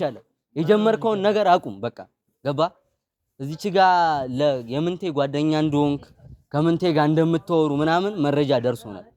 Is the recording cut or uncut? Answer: uncut